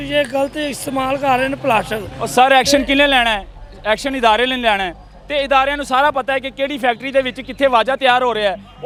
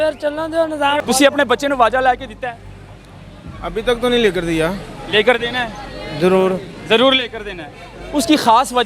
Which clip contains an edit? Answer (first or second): second